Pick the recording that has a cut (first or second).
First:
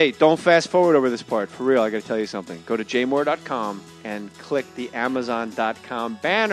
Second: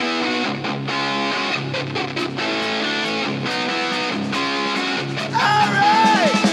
second